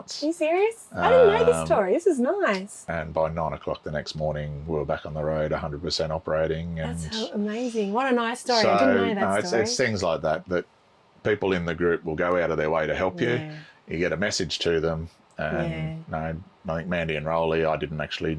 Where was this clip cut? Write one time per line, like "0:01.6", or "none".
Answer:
0:02.9